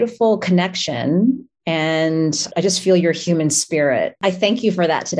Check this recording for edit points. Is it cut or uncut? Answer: cut